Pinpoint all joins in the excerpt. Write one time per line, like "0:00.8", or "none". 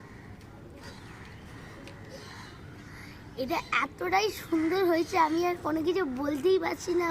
0:00.9